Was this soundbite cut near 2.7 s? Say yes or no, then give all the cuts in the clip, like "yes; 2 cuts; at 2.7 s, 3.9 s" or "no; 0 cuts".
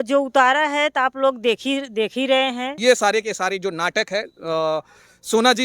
yes; 1 cut; at 2.7 s